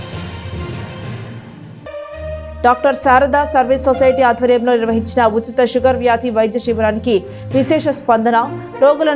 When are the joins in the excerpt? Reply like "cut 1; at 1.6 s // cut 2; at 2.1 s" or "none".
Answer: none